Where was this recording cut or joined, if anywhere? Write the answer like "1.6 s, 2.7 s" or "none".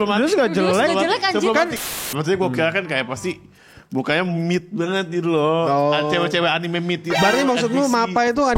1.8 s